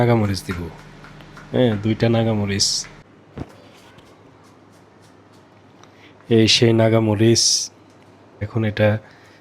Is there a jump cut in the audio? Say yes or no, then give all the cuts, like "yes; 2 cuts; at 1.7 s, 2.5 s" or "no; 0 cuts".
yes; 2 cuts; at 3.0 s, 8.5 s